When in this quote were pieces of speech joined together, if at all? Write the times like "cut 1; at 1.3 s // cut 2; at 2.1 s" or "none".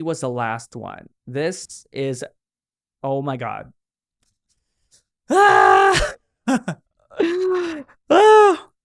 none